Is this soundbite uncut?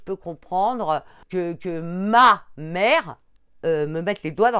no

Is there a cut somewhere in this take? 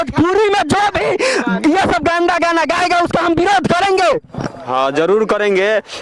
no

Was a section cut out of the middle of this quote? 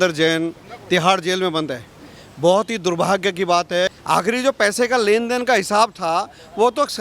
yes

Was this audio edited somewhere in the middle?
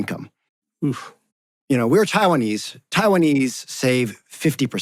no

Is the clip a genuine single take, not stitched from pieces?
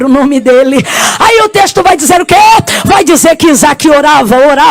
yes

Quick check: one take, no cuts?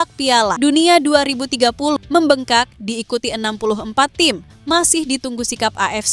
yes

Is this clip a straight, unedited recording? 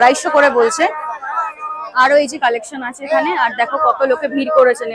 yes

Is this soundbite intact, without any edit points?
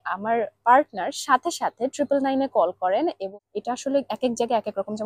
no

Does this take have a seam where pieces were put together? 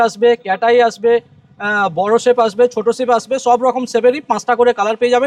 no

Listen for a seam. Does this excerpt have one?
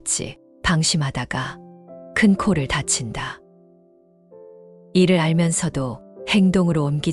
yes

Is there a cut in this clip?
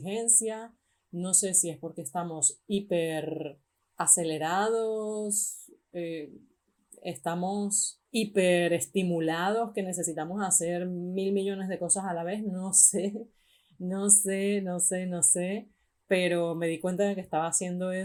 no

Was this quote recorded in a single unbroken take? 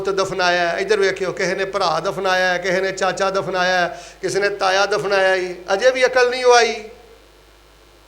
yes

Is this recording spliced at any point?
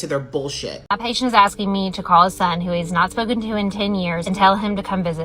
yes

